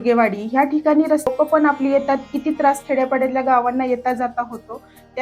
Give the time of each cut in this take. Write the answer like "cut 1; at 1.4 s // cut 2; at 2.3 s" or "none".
cut 1; at 1.3 s